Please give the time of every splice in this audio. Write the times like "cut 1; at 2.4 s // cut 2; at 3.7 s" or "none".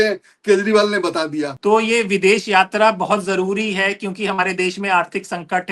cut 1; at 1.5 s